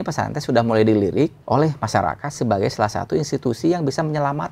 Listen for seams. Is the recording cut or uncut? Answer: cut